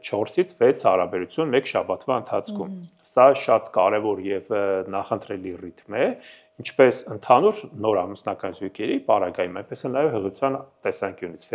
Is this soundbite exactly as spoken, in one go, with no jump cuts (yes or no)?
yes